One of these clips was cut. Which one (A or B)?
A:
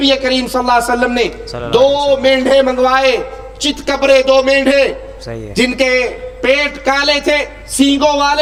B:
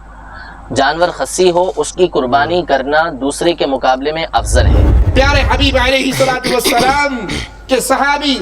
B